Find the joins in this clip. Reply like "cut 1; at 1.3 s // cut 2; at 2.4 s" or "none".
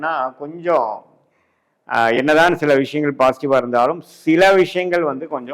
none